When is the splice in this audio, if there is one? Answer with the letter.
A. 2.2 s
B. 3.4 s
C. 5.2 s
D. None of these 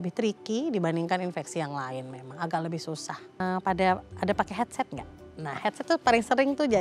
B